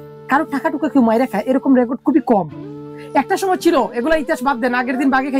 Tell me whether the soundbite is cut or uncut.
uncut